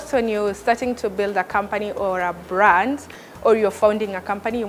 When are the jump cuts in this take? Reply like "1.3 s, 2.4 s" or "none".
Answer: none